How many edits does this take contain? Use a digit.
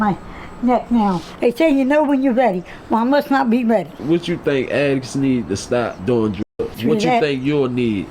3